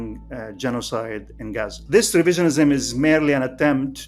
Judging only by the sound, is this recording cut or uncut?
cut